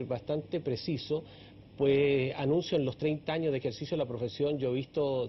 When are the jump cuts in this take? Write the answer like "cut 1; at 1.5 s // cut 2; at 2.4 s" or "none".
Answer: cut 1; at 2.9 s